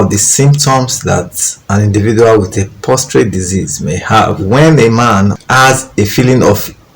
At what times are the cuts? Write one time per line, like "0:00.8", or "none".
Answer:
0:04.4